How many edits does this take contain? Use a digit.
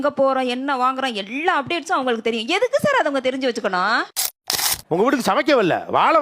1